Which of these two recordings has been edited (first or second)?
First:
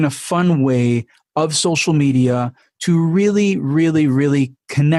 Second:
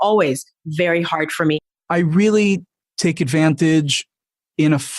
second